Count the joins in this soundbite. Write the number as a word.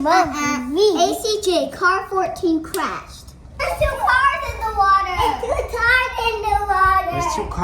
one